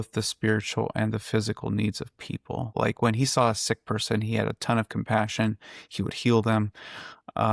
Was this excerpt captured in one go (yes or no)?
no